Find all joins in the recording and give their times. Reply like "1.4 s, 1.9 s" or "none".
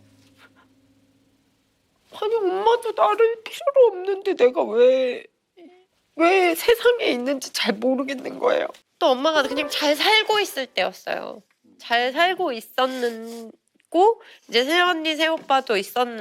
8.8 s